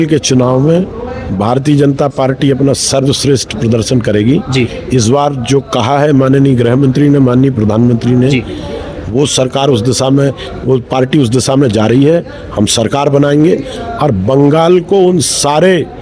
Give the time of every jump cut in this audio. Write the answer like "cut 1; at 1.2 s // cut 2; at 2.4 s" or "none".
none